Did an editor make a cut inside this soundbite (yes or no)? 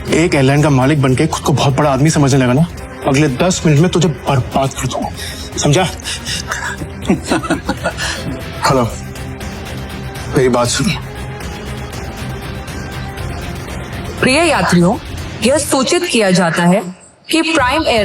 yes